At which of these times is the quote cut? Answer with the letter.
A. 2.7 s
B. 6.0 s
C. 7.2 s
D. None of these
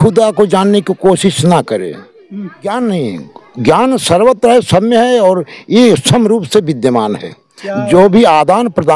A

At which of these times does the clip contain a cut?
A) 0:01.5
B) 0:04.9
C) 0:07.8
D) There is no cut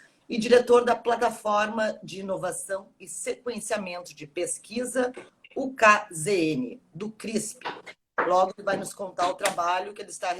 B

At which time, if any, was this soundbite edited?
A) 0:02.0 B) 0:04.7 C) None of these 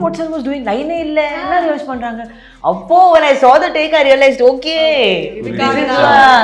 C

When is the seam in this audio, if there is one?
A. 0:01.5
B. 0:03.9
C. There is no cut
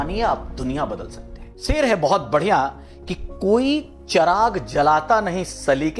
A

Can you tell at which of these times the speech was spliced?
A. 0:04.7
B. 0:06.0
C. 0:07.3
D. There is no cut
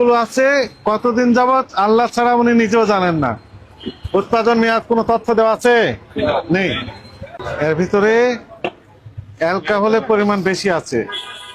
C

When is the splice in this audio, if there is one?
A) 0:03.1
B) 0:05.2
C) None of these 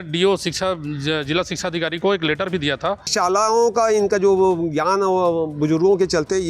A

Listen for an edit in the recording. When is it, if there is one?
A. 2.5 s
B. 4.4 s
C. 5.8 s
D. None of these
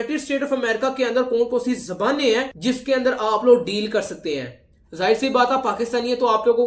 D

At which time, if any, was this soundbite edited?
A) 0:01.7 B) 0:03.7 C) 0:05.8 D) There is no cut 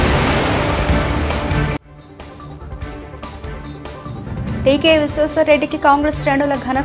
B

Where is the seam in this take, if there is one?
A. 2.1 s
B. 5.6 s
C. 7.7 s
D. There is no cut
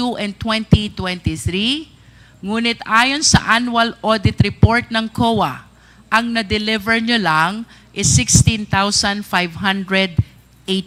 D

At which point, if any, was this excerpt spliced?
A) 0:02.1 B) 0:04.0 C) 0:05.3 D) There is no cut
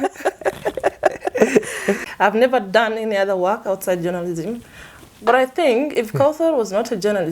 A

